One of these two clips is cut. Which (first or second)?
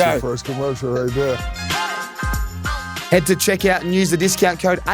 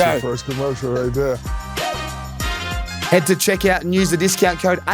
second